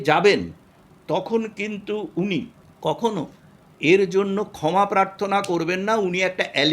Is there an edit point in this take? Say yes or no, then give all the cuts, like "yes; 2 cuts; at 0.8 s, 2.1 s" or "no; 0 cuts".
yes; 1 cut; at 2.6 s